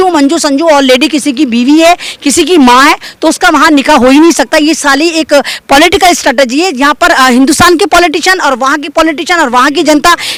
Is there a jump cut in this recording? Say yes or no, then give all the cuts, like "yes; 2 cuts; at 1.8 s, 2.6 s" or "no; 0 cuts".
no; 0 cuts